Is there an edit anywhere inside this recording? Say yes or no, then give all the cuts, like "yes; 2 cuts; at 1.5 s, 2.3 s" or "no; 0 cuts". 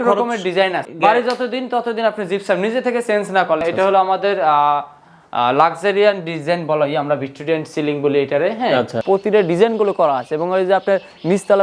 yes; 3 cuts; at 0.8 s, 3.6 s, 9.0 s